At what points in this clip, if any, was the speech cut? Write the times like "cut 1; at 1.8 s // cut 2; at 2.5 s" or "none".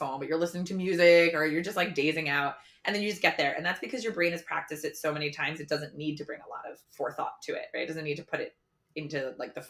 none